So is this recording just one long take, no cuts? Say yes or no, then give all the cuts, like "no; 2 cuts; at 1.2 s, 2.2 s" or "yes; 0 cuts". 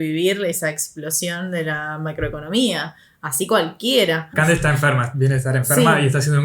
no; 1 cut; at 4.3 s